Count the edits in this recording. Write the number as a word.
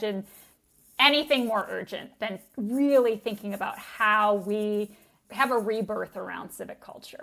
zero